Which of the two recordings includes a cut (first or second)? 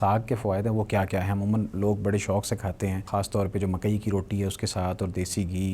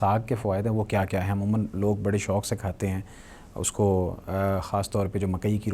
first